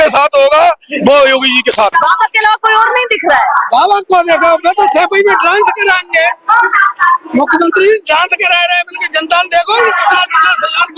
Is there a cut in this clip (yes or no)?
yes